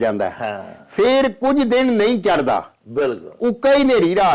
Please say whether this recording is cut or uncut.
uncut